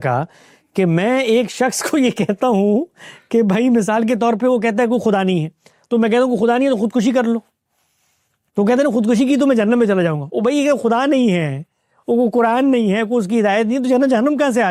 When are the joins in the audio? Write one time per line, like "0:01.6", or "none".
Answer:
none